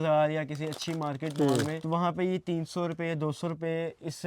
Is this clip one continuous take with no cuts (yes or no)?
no